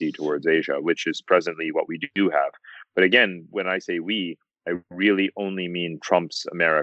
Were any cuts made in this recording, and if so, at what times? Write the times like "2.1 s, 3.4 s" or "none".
3.5 s